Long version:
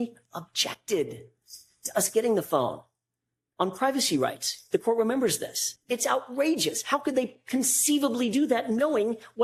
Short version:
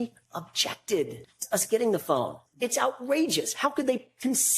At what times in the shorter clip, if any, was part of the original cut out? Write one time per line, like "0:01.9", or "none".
0:01.3
0:02.4